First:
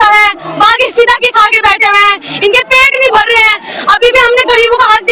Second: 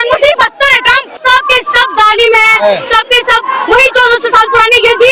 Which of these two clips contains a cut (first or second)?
second